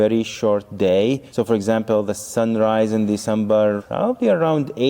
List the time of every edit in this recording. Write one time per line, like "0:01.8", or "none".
none